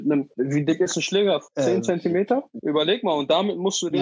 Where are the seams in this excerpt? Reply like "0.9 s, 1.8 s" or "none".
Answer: none